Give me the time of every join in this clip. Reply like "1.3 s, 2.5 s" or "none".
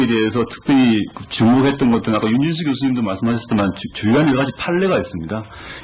none